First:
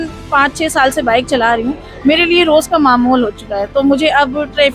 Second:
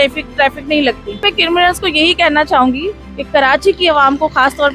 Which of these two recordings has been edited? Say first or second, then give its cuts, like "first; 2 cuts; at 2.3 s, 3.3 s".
second; 1 cut; at 1.2 s